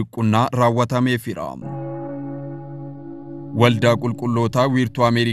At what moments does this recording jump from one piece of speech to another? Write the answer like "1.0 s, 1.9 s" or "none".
1.7 s, 3.5 s

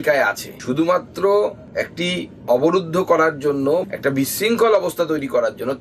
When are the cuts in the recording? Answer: none

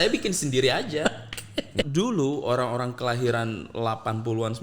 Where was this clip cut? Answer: 1.7 s

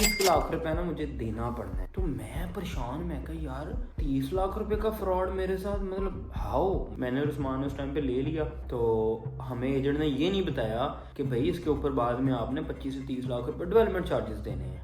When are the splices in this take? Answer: 6.9 s

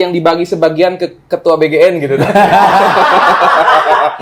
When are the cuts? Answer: none

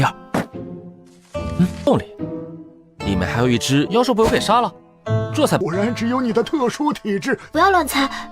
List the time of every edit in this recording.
3.9 s, 5.6 s

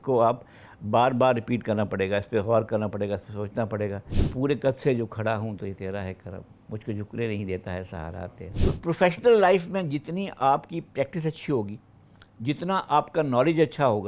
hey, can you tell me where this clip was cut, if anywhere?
4.2 s, 8.5 s

